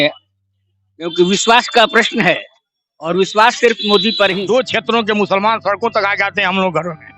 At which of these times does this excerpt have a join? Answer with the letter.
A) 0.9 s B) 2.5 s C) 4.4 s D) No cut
C